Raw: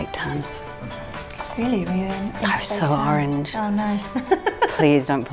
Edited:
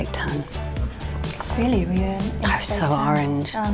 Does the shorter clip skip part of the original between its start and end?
no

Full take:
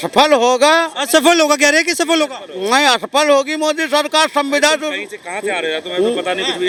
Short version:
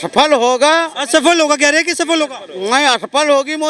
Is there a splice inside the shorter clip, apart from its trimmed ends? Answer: no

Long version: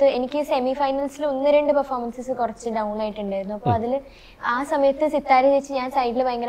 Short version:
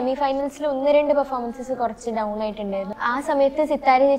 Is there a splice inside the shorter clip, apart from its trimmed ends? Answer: yes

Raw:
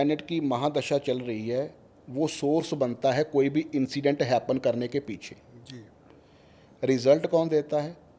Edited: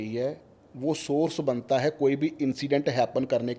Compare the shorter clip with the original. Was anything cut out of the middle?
no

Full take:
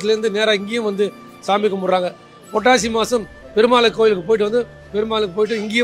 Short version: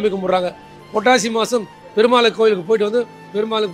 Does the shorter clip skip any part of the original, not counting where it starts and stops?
no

